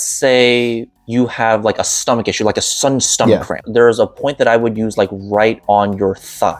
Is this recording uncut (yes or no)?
no